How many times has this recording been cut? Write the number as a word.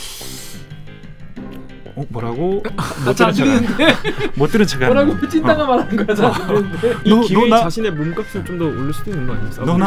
zero